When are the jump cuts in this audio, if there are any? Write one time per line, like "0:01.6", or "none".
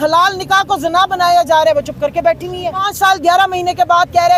0:02.9